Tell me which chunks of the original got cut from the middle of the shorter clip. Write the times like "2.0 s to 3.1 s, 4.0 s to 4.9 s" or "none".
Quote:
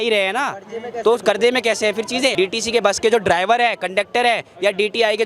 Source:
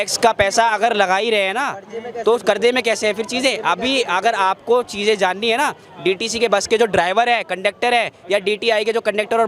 3.5 s to 6.0 s